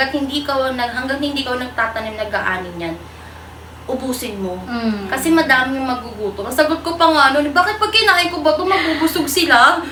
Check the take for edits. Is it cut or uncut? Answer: uncut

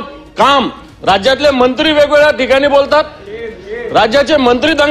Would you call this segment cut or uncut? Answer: uncut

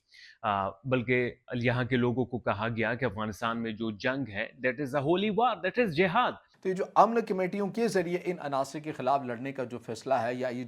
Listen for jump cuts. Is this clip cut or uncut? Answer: cut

